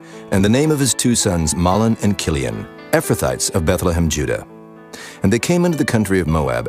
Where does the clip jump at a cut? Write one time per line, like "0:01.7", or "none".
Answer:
0:03.2